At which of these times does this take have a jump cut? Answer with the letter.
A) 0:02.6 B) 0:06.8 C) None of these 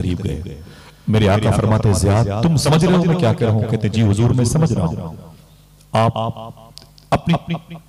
A